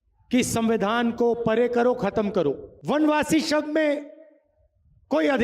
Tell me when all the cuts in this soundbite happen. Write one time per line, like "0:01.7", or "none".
0:02.7